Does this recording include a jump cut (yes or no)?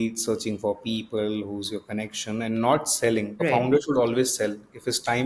yes